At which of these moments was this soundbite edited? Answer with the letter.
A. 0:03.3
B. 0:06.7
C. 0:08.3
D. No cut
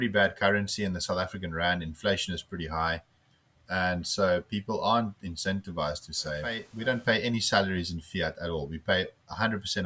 B